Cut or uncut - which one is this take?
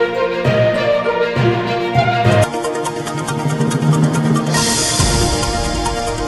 uncut